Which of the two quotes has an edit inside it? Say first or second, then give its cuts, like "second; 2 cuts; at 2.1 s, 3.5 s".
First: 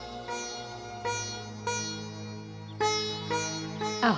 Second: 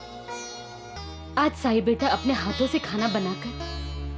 second; 1 cut; at 1.0 s